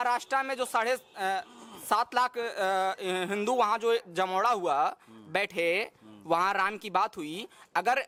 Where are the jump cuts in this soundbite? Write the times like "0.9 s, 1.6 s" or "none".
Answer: none